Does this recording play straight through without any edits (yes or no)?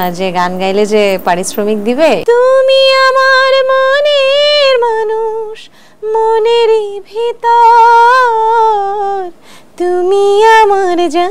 no